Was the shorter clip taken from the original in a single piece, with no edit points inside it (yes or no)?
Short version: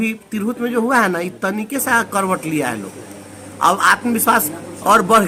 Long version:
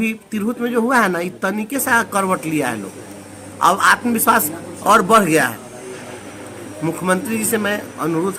yes